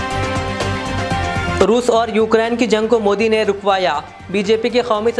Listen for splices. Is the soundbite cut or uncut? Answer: cut